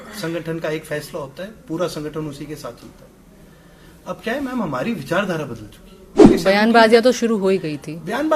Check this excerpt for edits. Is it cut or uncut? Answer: cut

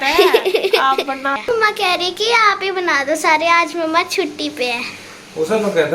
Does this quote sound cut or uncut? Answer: cut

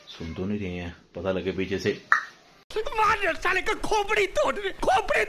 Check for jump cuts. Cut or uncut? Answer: uncut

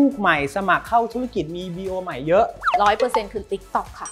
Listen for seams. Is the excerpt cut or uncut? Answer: uncut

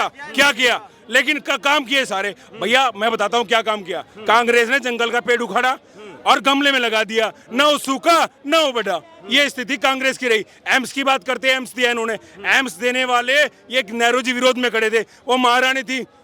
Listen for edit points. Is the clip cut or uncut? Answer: uncut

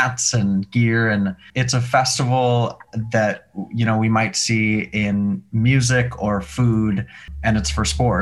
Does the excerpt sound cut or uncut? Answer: cut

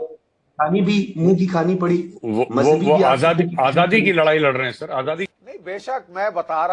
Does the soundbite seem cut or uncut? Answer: cut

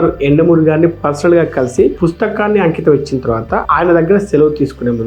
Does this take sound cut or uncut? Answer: uncut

